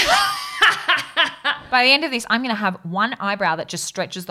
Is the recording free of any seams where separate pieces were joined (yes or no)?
no